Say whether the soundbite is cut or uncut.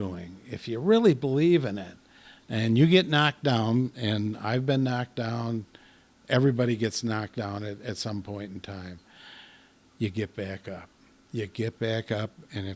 uncut